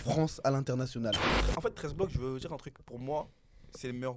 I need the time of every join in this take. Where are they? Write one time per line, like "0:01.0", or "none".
0:01.3